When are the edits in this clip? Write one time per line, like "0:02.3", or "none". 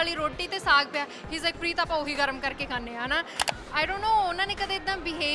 0:03.4